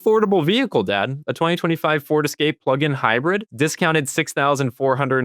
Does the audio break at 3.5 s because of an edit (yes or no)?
yes